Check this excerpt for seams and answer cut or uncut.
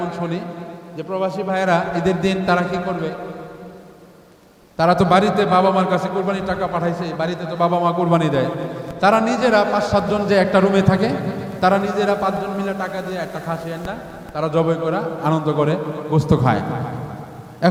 uncut